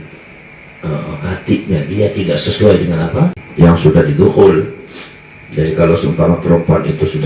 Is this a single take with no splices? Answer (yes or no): no